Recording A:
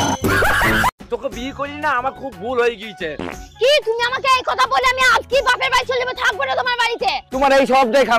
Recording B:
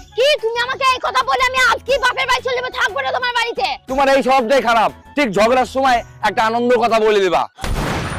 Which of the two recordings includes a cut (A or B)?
A